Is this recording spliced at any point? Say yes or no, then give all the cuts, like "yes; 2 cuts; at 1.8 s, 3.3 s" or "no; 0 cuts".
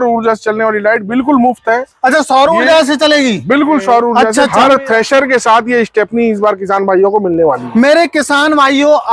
yes; 1 cut; at 4.2 s